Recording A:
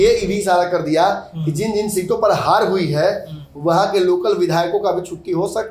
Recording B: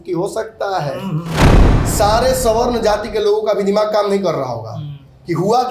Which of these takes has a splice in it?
B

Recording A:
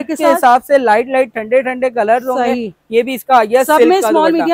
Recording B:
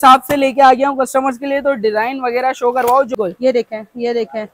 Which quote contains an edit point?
B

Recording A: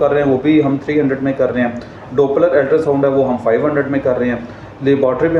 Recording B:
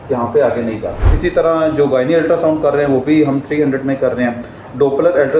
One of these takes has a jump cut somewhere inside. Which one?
B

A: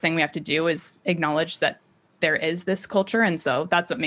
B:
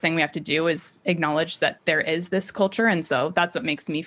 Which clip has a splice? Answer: B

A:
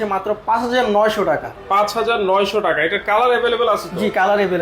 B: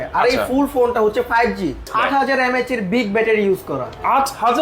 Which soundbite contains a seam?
B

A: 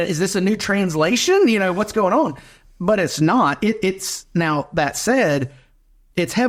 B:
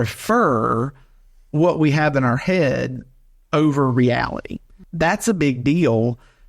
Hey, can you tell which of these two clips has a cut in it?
B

